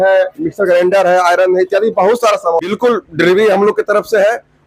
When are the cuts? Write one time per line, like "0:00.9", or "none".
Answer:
0:02.7